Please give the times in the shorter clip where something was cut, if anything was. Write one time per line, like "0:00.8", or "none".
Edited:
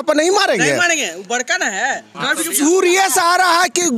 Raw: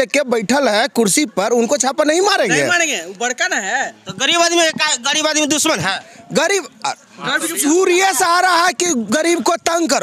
0:02.1